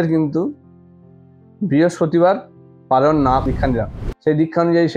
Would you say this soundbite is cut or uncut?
cut